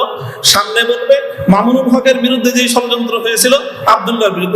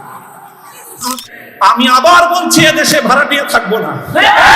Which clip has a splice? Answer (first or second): second